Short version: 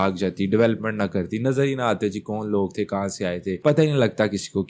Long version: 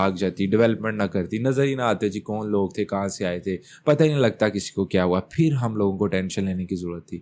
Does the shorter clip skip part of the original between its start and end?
yes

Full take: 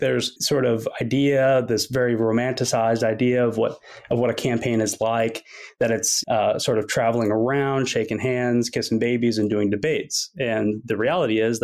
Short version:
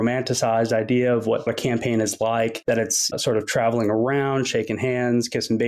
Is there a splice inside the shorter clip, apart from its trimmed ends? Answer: yes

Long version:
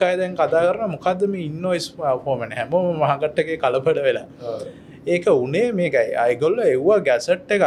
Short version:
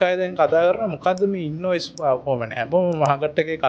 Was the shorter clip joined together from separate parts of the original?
no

